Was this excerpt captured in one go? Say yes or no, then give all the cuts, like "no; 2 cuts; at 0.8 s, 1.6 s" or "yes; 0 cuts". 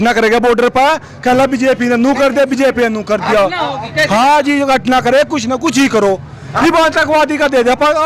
yes; 0 cuts